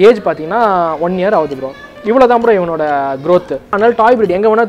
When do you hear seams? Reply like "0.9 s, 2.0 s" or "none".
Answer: 3.8 s